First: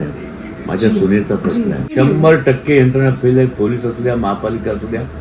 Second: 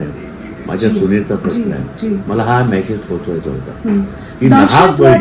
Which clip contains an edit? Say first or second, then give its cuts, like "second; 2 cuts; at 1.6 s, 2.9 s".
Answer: first; 1 cut; at 1.9 s